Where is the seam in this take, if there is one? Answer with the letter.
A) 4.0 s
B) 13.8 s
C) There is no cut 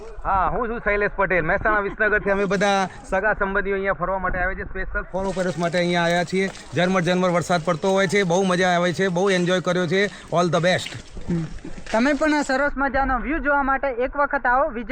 C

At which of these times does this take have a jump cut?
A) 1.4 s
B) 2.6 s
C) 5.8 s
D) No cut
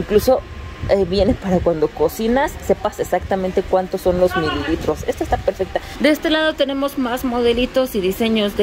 C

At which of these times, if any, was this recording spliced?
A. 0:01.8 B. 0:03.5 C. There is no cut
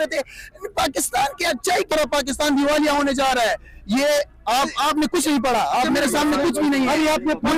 C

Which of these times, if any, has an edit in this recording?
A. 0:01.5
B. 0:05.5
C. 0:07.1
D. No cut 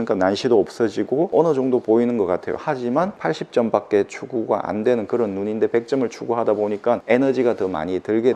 D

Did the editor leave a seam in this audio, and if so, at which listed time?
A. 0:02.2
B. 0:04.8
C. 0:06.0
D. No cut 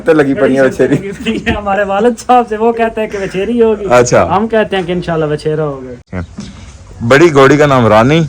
C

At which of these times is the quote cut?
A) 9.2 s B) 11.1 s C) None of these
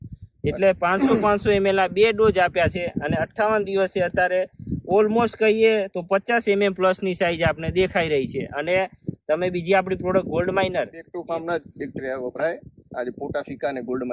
B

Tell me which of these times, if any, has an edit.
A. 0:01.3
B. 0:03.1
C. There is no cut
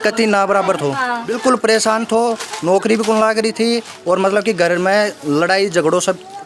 A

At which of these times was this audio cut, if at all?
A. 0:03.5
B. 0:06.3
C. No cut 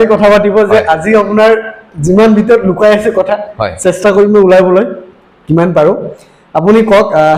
C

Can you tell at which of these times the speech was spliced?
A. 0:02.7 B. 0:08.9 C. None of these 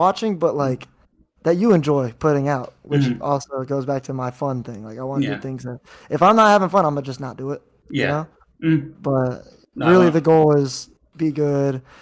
C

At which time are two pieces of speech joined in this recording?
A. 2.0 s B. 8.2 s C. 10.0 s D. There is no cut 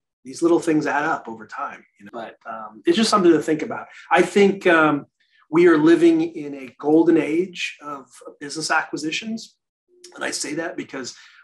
A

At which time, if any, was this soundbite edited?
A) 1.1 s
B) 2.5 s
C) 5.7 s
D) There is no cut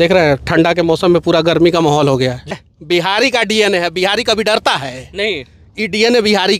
B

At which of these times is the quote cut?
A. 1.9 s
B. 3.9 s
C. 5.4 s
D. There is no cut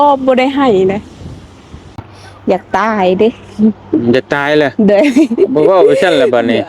A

